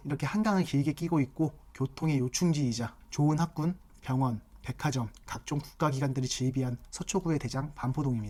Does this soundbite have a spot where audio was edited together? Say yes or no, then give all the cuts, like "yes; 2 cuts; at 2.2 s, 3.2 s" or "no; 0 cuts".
no; 0 cuts